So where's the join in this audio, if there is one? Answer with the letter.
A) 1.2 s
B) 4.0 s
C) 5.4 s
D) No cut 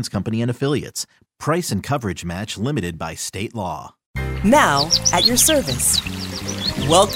B